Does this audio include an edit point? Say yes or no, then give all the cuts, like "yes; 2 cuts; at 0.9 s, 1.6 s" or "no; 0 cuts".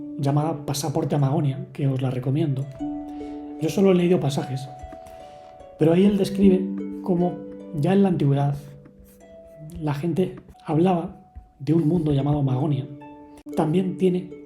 yes; 2 cuts; at 10.5 s, 13.4 s